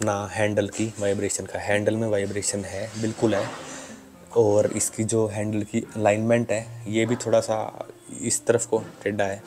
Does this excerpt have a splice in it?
no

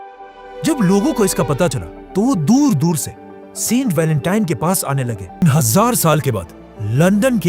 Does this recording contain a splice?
yes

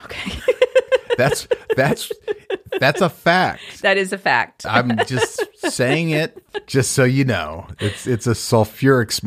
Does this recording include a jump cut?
no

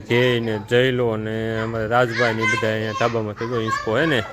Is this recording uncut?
yes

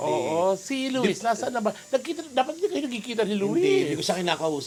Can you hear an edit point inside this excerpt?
no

